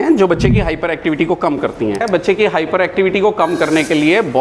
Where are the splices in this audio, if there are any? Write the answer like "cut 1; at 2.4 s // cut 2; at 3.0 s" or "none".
cut 1; at 2.0 s